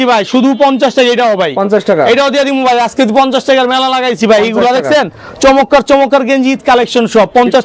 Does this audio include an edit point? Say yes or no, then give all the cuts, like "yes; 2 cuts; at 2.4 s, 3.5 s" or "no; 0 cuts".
no; 0 cuts